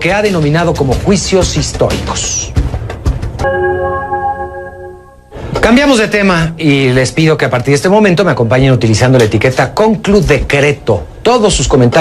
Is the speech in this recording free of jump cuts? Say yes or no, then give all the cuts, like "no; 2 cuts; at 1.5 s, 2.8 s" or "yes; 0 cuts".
yes; 0 cuts